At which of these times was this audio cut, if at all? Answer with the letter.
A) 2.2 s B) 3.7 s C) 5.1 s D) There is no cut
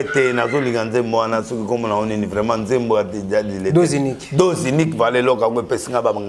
D